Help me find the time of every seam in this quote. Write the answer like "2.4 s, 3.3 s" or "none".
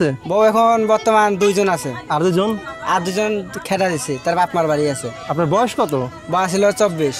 none